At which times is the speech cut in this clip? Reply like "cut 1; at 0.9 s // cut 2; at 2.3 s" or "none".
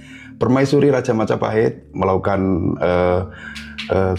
none